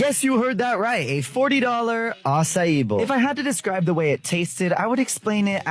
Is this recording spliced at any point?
yes; 1 cut; at 3.0 s

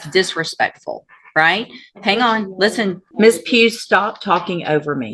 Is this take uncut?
no; 1 cut; at 3.0 s

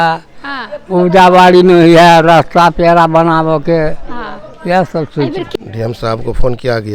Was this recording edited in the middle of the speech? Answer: yes; 1 cut; at 5.4 s

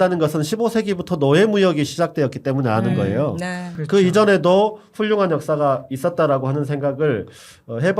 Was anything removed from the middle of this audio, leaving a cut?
yes; 1 cut; at 3.7 s

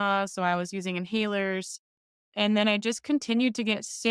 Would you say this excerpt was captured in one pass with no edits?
no; 1 cut; at 2.2 s

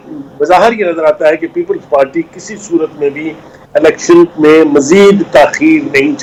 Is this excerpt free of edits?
yes; 0 cuts

